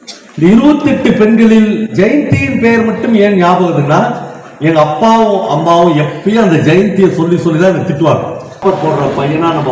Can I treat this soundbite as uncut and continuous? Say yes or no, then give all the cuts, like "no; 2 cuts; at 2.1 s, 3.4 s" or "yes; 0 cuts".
no; 1 cut; at 8.6 s